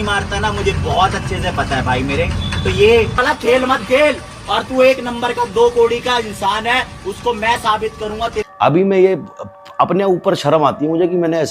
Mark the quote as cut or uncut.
cut